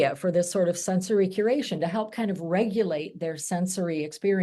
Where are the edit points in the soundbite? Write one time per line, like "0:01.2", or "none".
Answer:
none